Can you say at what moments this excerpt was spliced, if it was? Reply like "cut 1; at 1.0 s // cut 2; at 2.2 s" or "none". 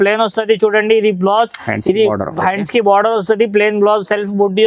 none